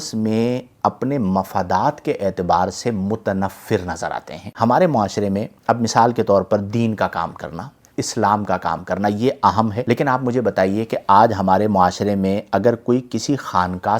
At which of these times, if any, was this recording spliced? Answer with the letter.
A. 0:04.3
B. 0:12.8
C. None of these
A